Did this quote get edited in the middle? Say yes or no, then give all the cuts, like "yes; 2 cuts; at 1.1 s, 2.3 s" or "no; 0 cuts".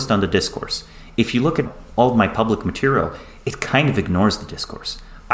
yes; 1 cut; at 1.7 s